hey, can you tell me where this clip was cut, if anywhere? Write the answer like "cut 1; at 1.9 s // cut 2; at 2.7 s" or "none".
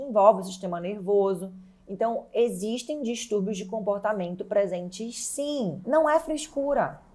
cut 1; at 5.8 s

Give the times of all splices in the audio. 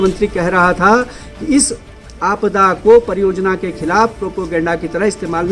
none

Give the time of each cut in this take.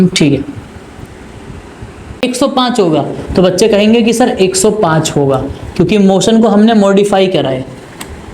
cut 1; at 2.2 s

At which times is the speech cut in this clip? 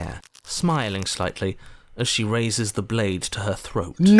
none

